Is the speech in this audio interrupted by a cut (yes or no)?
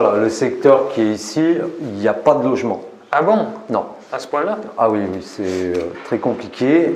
no